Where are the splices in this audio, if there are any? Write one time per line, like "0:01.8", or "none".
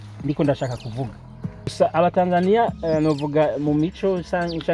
0:01.7